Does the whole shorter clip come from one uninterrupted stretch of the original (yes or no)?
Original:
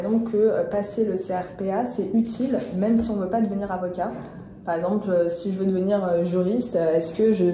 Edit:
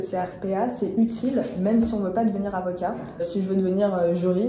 no